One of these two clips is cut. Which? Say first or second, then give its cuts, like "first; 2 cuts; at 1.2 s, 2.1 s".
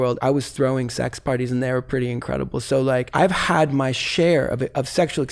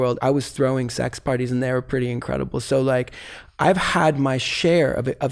first; 1 cut; at 3.1 s